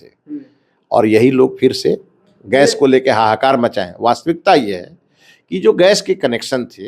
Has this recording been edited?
no; 0 cuts

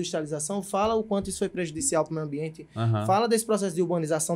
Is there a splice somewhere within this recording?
no; 0 cuts

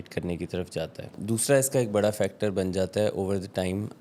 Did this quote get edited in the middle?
yes; 1 cut; at 1.1 s

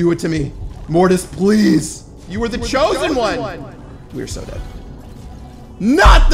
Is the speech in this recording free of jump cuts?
no; 1 cut; at 4.0 s

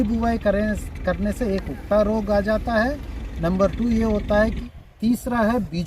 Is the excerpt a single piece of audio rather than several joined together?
no; 1 cut; at 4.6 s

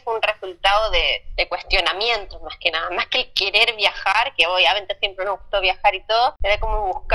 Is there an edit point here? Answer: no; 0 cuts

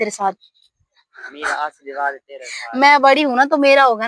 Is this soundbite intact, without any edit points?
yes; 0 cuts

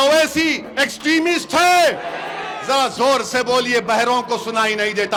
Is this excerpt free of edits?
yes; 0 cuts

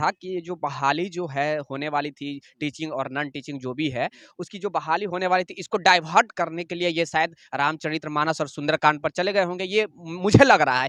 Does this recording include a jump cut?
no; 0 cuts

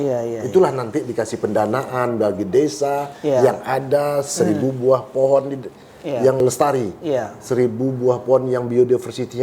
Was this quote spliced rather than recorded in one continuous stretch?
yes; 1 cut; at 6.4 s

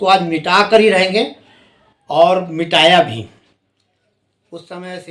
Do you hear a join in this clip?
no; 0 cuts

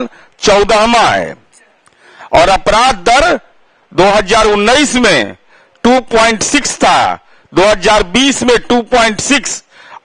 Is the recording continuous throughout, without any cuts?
yes; 0 cuts

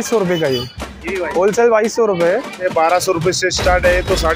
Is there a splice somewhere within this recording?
yes; 1 cut; at 2.6 s

